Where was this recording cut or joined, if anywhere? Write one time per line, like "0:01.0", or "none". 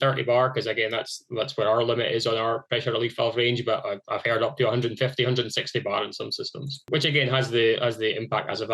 0:06.8